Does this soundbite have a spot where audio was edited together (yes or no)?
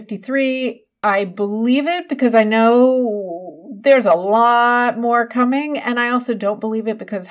yes